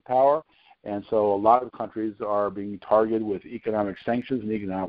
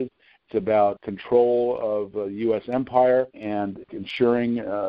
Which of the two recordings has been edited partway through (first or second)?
second